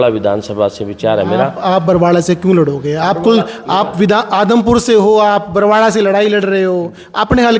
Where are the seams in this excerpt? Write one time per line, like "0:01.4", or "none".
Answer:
none